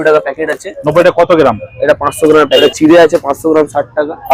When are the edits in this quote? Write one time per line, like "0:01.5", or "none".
0:02.6